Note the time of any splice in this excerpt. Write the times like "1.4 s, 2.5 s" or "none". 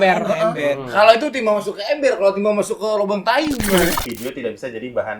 4.0 s